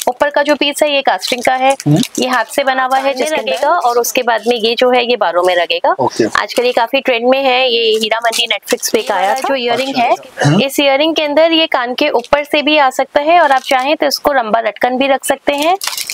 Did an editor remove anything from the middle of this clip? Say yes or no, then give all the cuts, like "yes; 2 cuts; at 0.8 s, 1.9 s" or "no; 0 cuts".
yes; 2 cuts; at 3.3 s, 9.5 s